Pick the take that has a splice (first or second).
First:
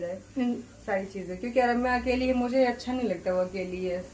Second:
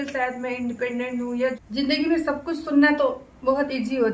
second